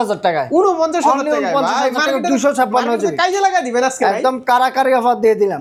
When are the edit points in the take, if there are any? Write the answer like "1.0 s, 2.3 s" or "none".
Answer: none